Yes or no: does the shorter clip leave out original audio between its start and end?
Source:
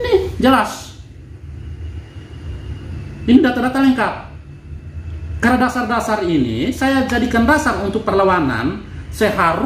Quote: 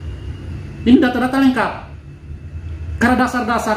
no